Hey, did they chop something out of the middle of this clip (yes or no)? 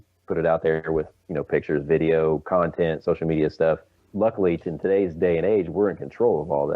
yes